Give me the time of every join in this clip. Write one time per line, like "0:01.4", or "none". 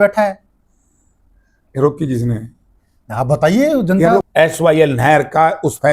0:04.3

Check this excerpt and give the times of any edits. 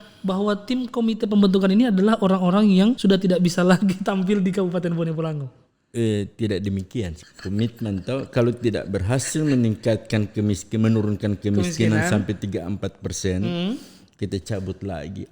0:03.0
0:07.2

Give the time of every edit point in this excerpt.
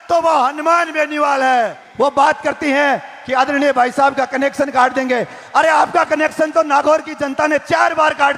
0:01.8

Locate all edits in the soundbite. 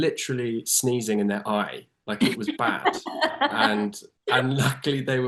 none

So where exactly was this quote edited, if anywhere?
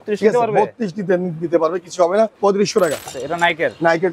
0:02.3
0:03.2

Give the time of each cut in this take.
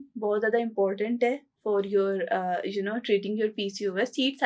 none

